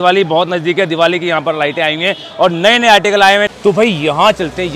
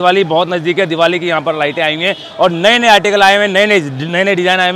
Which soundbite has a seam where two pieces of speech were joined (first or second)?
first